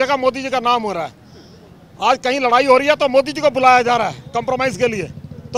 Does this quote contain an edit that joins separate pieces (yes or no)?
no